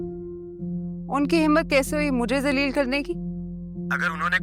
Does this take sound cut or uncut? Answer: uncut